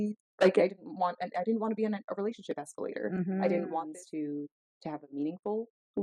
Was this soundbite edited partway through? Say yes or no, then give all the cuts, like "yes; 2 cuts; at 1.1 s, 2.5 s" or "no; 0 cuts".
yes; 1 cut; at 3.9 s